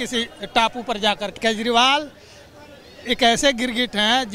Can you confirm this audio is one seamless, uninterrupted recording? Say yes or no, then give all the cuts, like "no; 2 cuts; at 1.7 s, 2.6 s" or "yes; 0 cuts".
no; 1 cut; at 1.4 s